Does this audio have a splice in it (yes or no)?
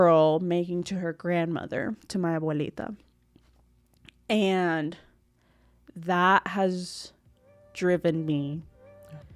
no